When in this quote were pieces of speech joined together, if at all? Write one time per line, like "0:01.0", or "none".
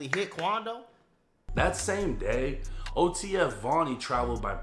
0:01.4